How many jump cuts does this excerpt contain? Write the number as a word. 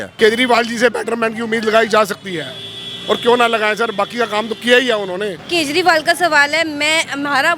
one